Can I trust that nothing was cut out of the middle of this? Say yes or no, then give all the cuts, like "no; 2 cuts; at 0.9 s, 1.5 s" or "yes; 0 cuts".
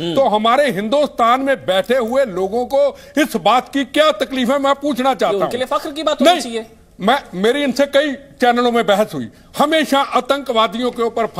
yes; 0 cuts